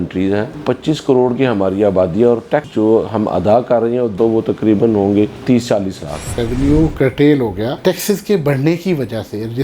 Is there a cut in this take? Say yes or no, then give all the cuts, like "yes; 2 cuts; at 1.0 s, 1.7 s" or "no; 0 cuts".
yes; 2 cuts; at 4.1 s, 6.4 s